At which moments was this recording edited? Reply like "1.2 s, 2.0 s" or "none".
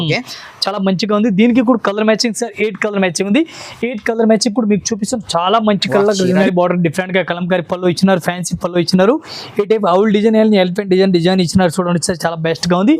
6.5 s

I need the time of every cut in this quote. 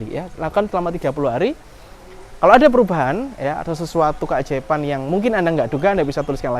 none

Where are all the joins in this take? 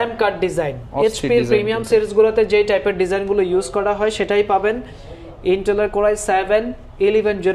none

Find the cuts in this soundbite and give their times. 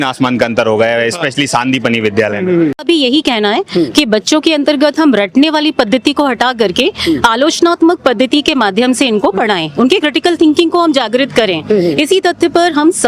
2.8 s

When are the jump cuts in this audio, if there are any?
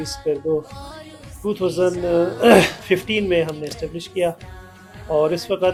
none

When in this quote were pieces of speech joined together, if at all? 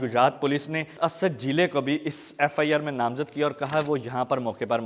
0.9 s

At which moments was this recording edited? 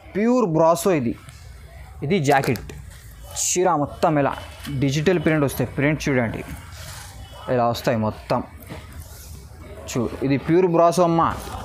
none

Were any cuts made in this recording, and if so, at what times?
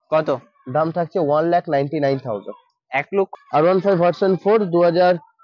3.3 s

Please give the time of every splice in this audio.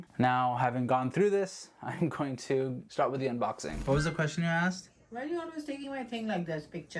3.7 s

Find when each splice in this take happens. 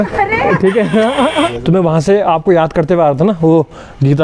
1.5 s

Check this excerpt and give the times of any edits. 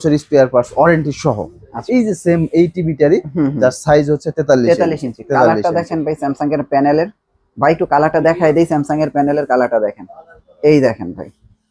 1.8 s

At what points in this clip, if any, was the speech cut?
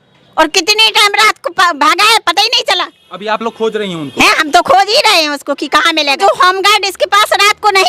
6.2 s

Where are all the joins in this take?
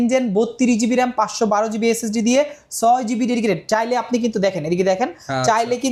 none

